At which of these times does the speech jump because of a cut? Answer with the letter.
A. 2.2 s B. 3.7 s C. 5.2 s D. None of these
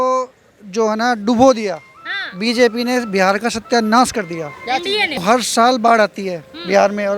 C